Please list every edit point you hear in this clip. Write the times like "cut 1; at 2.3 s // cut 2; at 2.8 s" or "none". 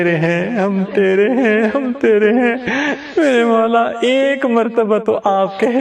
none